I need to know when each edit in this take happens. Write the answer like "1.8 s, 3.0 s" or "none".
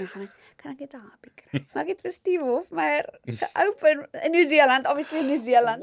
1.7 s